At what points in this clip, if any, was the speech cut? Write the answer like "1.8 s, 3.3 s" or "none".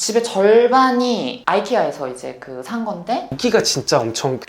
3.4 s